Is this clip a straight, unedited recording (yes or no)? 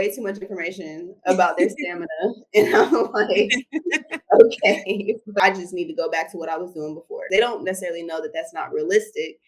no